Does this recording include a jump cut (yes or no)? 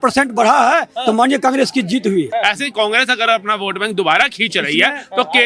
yes